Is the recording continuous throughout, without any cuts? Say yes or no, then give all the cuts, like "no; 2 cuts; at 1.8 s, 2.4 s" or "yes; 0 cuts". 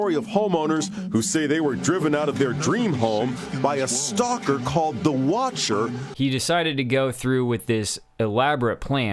no; 1 cut; at 6.0 s